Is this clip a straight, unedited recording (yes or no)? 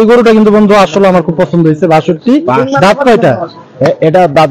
yes